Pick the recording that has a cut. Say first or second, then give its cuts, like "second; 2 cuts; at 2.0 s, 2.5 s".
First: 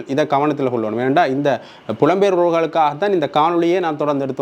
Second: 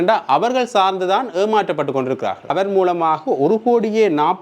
second; 1 cut; at 2.5 s